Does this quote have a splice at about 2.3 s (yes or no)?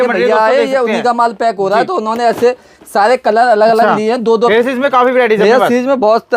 no